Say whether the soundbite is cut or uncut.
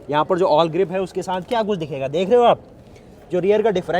uncut